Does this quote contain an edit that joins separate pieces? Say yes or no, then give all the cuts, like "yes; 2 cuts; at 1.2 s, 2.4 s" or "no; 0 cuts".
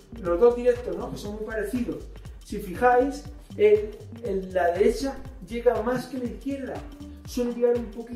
no; 0 cuts